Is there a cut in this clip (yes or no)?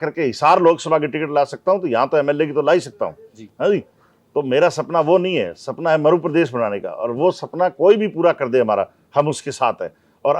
no